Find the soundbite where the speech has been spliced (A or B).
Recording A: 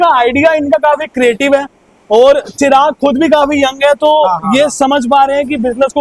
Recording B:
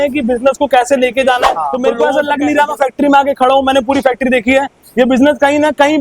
B